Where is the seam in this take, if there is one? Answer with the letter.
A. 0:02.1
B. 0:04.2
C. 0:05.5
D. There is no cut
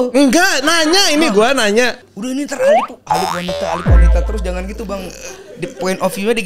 A